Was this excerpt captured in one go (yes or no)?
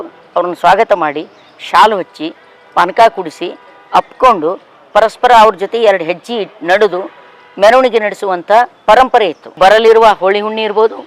no